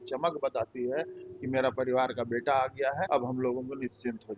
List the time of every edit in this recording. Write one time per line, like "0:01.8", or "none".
0:03.1